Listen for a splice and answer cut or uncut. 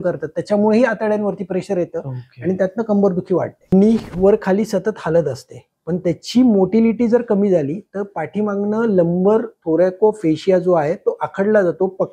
cut